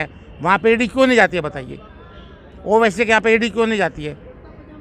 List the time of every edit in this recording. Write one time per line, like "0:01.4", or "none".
none